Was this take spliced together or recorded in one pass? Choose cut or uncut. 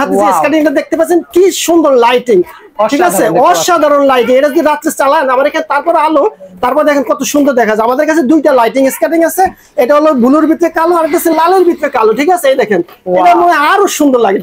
uncut